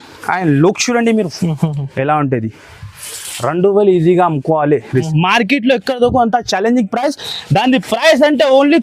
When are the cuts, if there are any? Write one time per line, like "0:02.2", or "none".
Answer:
0:05.1